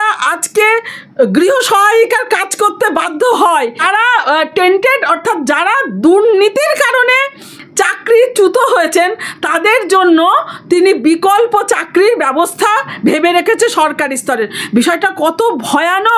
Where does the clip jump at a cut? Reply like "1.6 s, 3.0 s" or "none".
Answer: 3.7 s